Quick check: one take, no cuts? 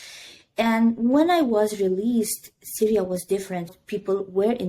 no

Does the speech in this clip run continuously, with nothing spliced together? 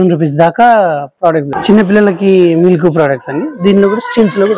no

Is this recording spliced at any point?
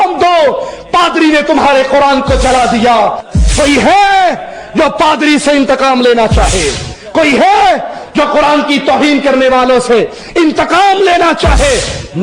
yes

